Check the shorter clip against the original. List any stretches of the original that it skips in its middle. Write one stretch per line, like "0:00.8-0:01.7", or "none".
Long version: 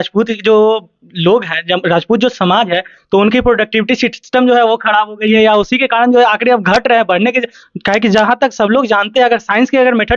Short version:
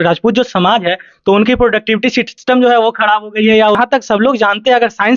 0:05.6-0:08.3